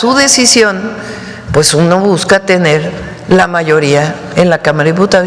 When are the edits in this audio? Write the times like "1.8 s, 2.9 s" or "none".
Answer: none